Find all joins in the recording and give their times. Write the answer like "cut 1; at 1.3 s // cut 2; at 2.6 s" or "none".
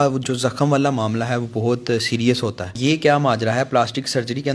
cut 1; at 2.7 s